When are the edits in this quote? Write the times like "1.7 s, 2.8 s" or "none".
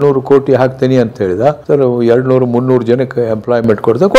none